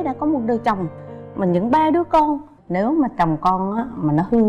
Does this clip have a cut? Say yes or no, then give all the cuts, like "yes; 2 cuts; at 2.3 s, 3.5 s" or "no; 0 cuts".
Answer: yes; 1 cut; at 2.6 s